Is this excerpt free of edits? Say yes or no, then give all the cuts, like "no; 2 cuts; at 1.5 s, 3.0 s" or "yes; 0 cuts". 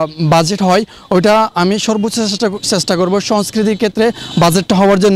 yes; 0 cuts